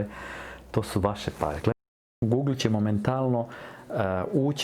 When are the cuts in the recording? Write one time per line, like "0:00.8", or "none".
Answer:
0:01.7